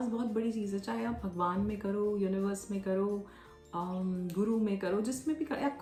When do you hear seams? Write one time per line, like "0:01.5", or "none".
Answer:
none